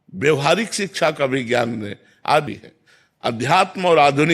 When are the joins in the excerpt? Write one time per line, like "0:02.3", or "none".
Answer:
0:02.5